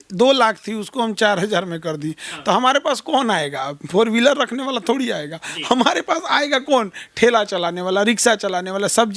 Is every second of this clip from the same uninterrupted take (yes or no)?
yes